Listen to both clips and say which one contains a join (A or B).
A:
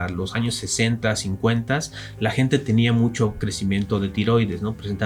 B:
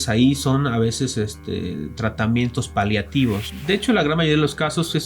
B